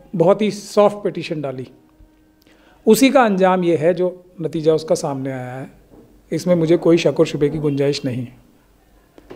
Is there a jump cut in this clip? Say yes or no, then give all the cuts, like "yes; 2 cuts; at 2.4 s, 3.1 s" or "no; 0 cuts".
no; 0 cuts